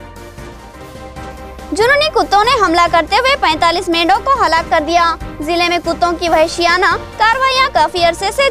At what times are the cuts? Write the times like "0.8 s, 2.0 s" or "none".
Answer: 1.3 s